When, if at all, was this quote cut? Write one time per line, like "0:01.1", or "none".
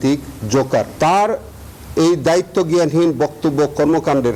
none